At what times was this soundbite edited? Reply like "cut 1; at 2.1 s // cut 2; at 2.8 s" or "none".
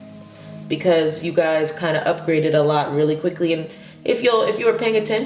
none